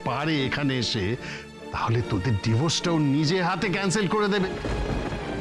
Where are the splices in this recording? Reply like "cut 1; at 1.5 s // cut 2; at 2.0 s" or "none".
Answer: cut 1; at 4.5 s